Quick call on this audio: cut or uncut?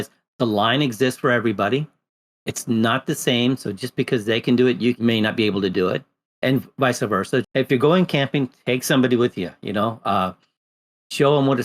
cut